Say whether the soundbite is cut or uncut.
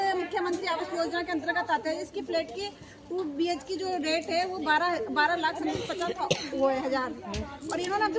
uncut